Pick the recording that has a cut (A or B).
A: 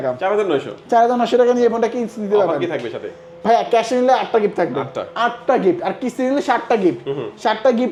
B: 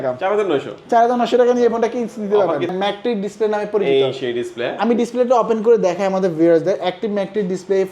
B